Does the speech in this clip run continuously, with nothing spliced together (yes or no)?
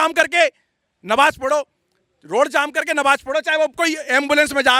yes